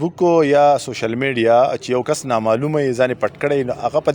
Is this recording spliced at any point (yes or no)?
no